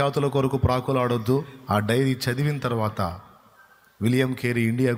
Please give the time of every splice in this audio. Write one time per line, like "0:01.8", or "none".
0:01.5